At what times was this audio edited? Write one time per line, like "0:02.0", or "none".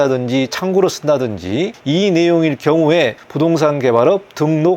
0:01.8
0:03.2

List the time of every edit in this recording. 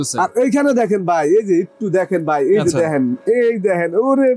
none

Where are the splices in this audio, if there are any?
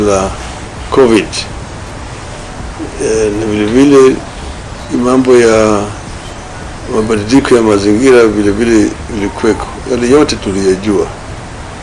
none

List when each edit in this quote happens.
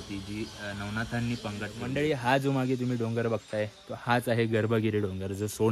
0:01.7

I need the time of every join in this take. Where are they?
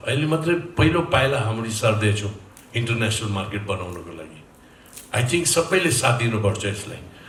none

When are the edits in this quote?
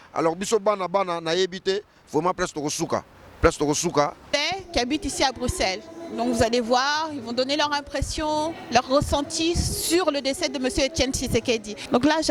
0:04.3

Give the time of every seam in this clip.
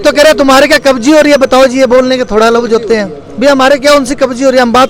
none

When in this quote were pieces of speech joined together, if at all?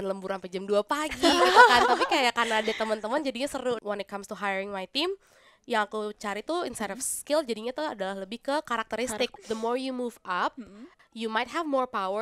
0:03.8
0:09.4
0:10.9

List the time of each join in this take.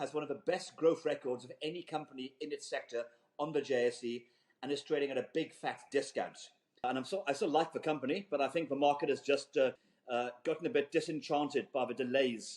0:06.8
0:09.9

